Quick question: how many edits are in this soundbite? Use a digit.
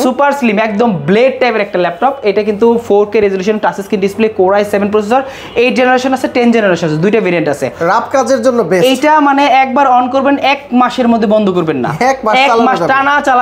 1